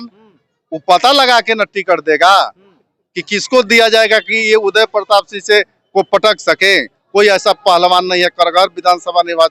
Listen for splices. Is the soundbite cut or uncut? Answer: uncut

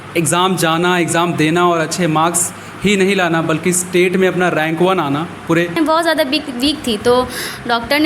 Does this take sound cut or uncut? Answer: cut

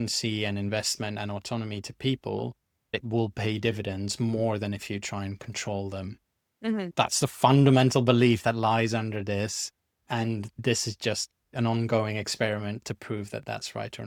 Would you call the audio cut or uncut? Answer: uncut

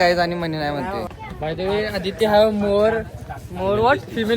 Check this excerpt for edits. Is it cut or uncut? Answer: cut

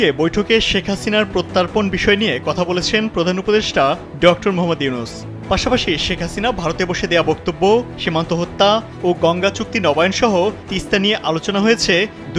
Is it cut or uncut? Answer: uncut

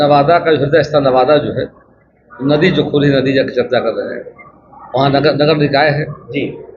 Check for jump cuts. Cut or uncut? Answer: uncut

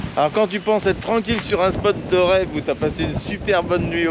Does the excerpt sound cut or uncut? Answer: uncut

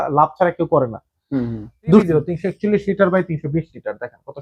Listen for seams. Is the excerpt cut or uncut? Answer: cut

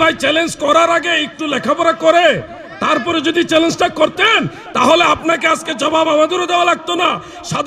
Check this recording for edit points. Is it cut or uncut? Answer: uncut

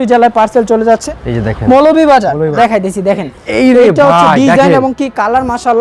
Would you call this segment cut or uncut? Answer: cut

